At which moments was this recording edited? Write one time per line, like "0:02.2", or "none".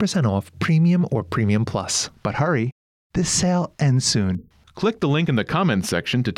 0:02.0